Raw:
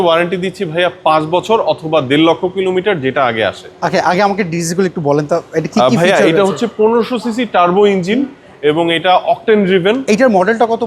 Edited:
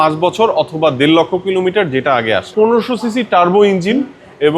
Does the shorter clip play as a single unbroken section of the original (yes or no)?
no